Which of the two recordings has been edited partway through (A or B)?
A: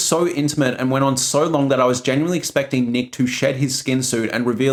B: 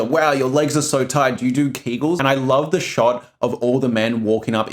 B